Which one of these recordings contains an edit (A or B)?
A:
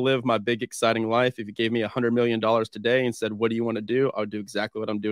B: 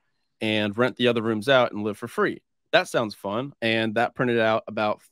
B